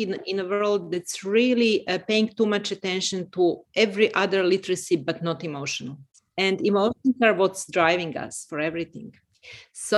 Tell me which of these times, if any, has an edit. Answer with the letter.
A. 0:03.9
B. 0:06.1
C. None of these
B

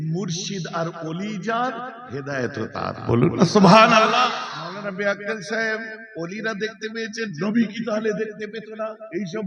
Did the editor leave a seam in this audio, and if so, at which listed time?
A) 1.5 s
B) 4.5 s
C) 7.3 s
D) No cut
B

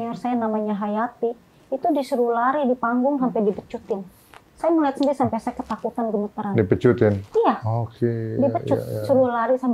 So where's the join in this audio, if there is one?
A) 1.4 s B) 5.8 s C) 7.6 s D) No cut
D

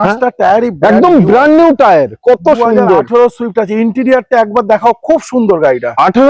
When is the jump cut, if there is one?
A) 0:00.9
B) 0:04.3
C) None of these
C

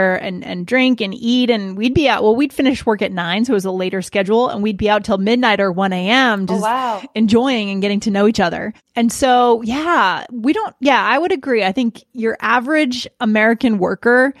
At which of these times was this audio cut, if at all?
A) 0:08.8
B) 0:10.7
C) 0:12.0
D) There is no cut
A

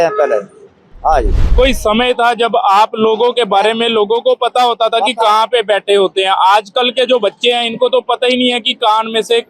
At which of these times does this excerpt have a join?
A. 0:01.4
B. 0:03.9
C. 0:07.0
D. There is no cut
A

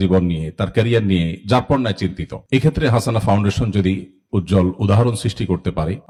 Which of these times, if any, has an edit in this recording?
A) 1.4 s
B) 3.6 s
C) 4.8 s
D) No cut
D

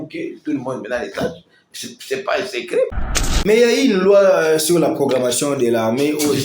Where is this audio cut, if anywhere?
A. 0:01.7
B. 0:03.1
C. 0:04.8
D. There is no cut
B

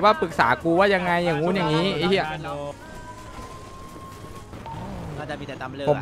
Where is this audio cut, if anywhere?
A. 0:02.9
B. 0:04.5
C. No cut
B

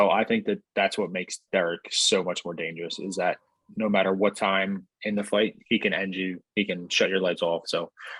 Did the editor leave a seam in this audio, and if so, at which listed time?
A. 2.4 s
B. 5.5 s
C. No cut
C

